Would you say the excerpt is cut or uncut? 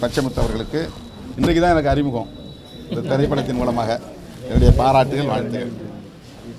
uncut